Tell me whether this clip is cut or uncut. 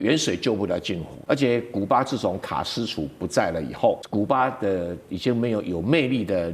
cut